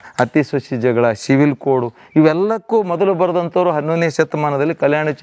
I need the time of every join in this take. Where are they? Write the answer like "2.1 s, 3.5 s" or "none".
none